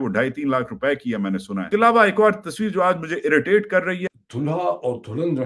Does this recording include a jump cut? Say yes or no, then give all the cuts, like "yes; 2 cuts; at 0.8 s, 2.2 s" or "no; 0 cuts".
no; 0 cuts